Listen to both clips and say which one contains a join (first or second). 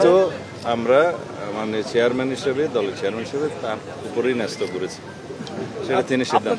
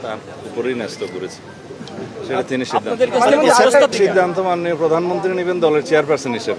second